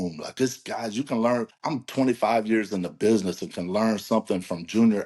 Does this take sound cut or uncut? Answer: cut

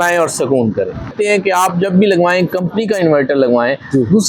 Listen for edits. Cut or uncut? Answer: cut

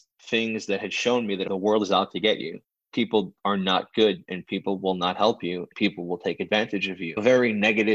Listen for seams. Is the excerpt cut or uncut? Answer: cut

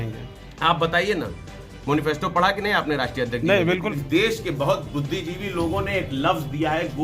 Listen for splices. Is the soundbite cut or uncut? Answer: cut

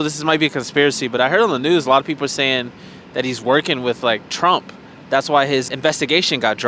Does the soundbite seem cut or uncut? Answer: cut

